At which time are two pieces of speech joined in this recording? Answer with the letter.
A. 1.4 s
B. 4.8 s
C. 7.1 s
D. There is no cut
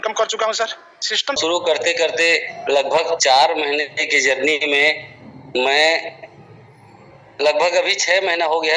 A